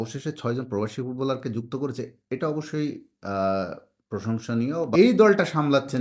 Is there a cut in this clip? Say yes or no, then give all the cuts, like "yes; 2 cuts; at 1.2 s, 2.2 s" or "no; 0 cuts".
yes; 1 cut; at 4.9 s